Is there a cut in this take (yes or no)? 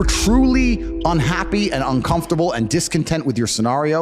no